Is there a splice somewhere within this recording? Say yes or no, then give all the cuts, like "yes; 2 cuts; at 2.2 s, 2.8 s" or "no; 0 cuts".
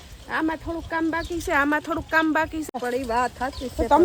yes; 1 cut; at 2.7 s